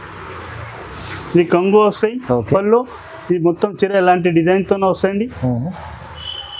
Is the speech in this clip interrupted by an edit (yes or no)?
no